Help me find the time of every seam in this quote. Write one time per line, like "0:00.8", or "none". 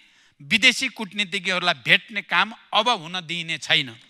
none